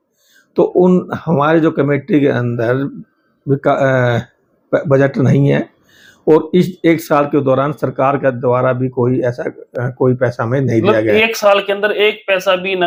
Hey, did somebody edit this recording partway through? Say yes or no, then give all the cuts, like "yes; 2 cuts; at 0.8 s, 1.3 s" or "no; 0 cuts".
no; 0 cuts